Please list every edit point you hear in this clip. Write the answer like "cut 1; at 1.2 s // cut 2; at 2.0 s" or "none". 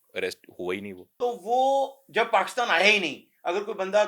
cut 1; at 1.0 s

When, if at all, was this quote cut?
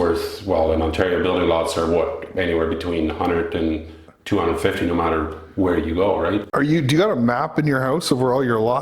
cut 1; at 6.5 s

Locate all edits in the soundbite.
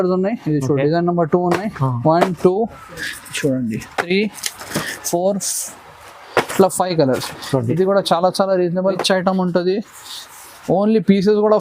cut 1; at 9.0 s

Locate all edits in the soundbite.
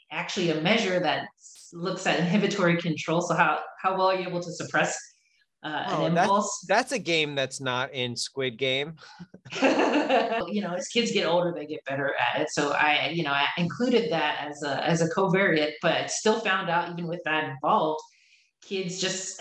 cut 1; at 10.5 s

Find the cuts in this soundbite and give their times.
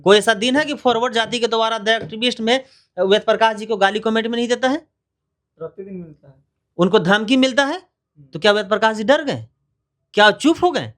none

